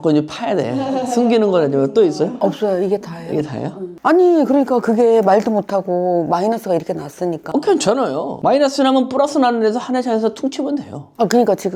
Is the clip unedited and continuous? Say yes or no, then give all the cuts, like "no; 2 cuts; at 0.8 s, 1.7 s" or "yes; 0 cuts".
yes; 0 cuts